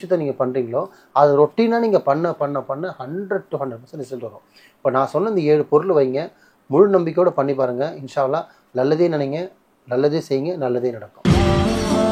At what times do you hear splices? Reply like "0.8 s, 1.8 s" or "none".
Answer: 11.1 s

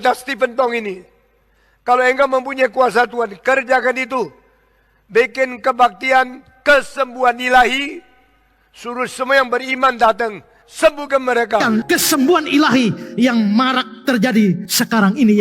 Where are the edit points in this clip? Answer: 11.6 s

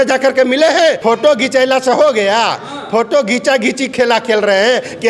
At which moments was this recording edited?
1.0 s

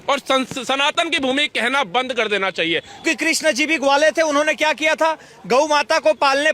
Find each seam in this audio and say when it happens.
3.0 s

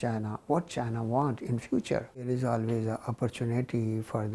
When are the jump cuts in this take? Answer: 2.2 s

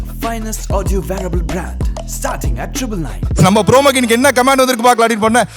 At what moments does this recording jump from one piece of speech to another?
3.4 s

